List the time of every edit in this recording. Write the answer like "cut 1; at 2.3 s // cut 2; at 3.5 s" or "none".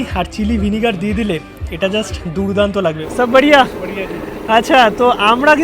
cut 1; at 3.0 s